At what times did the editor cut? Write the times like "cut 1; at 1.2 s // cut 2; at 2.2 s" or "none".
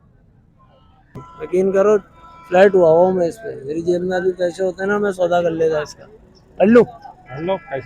cut 1; at 1.3 s